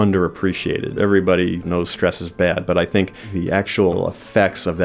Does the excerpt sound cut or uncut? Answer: cut